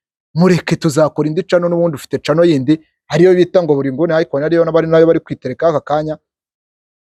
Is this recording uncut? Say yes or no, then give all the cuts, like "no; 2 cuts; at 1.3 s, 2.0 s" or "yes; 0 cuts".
yes; 0 cuts